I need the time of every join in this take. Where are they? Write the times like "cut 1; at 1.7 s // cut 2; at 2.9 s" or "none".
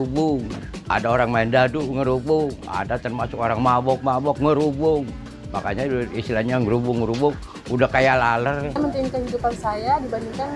cut 1; at 8.8 s